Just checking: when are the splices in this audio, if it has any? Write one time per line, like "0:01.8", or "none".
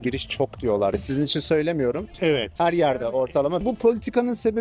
0:03.6